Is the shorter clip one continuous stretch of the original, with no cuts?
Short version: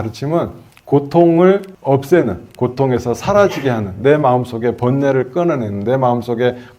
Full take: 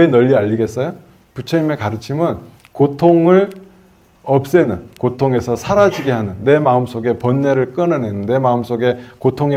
no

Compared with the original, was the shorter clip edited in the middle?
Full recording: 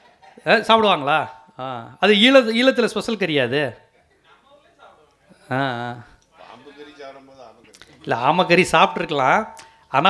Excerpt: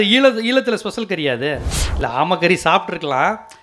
yes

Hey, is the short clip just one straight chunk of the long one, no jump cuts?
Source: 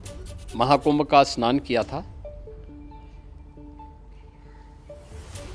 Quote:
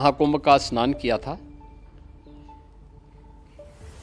no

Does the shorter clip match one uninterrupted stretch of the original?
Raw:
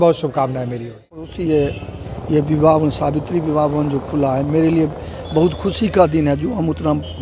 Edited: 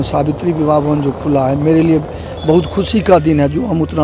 yes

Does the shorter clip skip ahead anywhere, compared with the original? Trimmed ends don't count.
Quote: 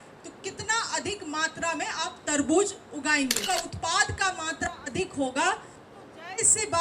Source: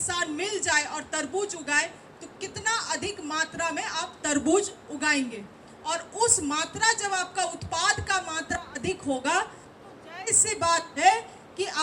yes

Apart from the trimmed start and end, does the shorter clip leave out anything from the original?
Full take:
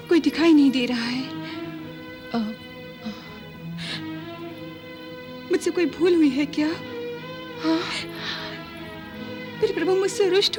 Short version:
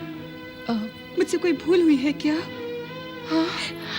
yes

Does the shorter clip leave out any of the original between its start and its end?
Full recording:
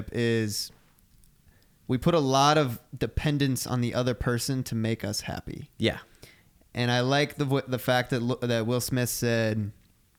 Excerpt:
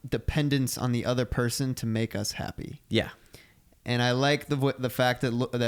no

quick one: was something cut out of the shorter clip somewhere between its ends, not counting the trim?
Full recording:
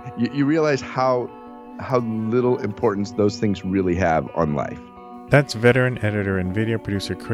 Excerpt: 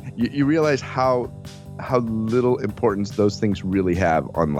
no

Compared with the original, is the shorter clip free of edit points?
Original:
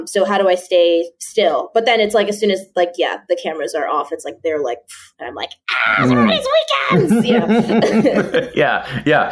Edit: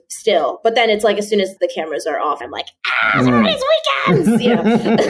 no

